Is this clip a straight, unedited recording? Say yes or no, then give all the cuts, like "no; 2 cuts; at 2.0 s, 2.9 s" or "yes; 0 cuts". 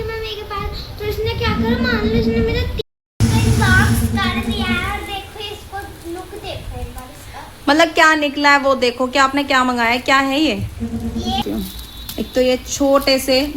no; 2 cuts; at 2.7 s, 11.4 s